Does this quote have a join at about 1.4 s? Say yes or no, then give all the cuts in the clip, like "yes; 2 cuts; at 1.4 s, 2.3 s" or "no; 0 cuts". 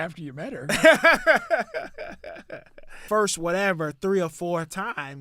no; 1 cut; at 3.0 s